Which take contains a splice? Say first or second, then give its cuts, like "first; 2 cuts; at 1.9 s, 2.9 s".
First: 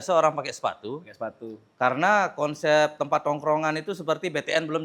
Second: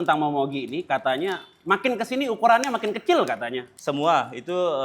second; 1 cut; at 3.7 s